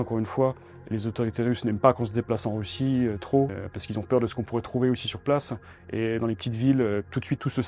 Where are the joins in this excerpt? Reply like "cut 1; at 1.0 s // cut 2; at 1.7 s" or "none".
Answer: cut 1; at 3.5 s